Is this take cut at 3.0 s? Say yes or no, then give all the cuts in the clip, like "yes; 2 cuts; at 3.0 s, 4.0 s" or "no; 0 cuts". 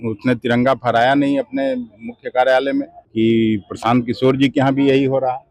yes; 1 cut; at 3.0 s